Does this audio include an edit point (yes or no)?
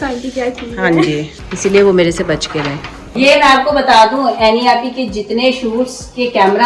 yes